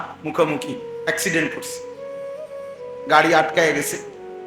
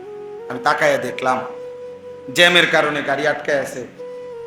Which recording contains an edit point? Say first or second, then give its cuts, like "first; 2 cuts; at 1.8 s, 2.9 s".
first; 2 cuts; at 1.5 s, 3.1 s